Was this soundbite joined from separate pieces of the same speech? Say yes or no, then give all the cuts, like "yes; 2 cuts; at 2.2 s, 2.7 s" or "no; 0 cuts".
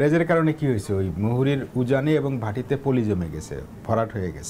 no; 0 cuts